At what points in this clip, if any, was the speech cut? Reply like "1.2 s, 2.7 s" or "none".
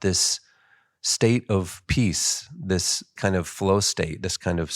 3.1 s

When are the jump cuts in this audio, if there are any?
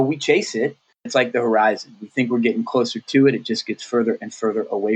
1.1 s

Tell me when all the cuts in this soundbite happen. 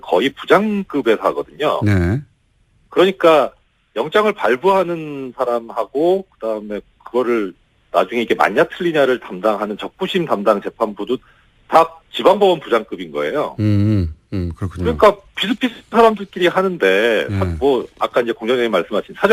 none

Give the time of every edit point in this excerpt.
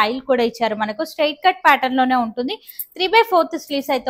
none

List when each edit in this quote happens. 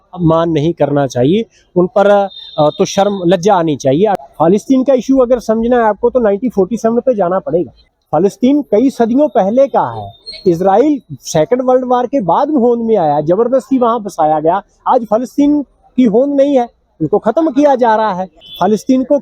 4.3 s

